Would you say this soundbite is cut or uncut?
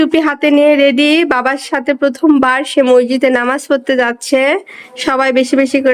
uncut